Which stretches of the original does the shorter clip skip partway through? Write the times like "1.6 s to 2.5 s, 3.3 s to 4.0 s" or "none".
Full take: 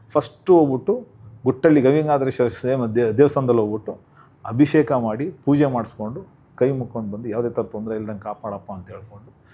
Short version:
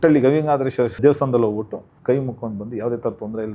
2.6 s to 3.1 s, 4.0 s to 6.4 s